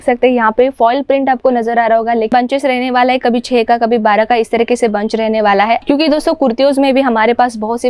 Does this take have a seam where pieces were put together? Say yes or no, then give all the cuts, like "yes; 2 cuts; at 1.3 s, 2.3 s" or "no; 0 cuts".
yes; 2 cuts; at 2.3 s, 5.8 s